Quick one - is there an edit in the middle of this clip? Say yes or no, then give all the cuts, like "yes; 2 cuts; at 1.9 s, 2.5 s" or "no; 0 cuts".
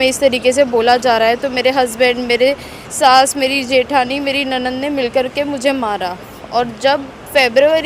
no; 0 cuts